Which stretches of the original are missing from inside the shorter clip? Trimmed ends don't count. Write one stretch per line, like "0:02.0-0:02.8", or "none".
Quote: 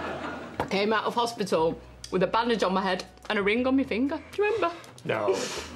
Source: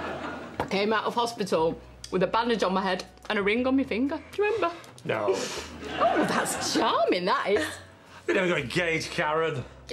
none